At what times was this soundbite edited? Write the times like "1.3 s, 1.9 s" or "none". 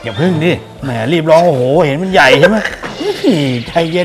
none